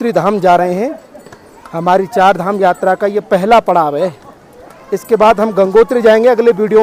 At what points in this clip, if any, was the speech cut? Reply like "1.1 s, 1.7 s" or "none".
none